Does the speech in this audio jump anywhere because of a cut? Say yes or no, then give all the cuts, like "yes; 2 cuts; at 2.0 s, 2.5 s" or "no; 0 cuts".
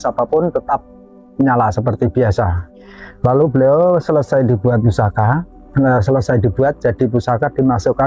yes; 1 cut; at 2.6 s